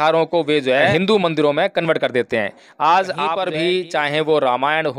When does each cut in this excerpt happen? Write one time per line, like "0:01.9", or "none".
0:00.9
0:03.4

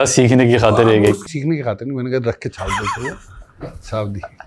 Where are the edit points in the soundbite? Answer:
0:01.2

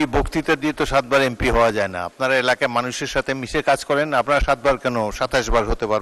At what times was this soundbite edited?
none

